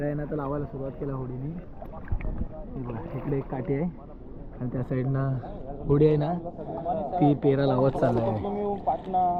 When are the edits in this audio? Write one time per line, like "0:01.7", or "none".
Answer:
none